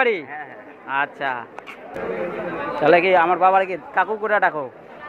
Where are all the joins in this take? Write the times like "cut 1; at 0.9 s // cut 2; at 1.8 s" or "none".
cut 1; at 2.0 s